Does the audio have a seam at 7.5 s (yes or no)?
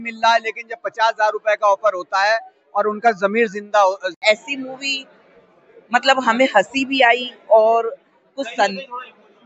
no